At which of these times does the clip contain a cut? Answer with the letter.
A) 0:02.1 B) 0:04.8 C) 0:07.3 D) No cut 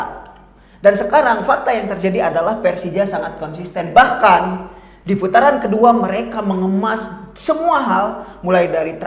D